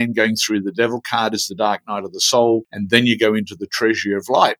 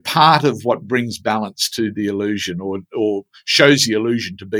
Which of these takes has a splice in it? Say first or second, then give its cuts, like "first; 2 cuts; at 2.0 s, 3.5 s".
first; 1 cut; at 2.7 s